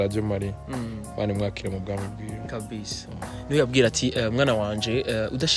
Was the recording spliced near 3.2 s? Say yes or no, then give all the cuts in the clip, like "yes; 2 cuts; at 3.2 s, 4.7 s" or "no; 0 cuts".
no; 0 cuts